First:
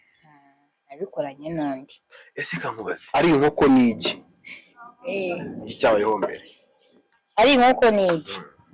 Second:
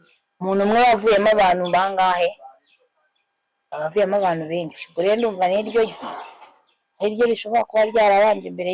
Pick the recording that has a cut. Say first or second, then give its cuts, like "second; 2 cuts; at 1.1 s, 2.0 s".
first; 1 cut; at 3.0 s